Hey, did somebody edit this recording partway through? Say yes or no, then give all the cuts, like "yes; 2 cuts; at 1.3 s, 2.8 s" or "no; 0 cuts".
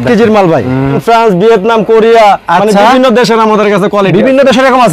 yes; 1 cut; at 1.0 s